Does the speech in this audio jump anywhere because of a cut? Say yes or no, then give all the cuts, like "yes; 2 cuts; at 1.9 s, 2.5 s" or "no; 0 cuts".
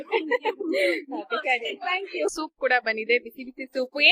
yes; 1 cut; at 2.3 s